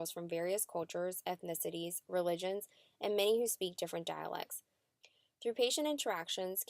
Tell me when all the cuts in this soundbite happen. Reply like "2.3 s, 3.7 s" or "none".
4.7 s